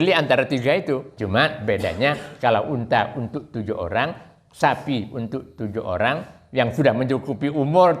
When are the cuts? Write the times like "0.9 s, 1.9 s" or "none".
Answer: 1.1 s